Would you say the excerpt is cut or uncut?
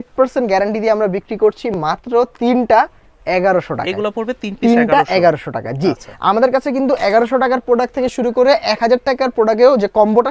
uncut